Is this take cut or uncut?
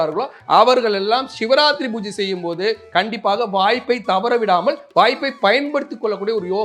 uncut